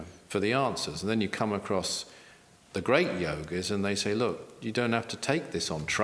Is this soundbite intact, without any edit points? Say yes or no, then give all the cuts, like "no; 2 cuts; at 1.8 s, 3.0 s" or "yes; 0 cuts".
yes; 0 cuts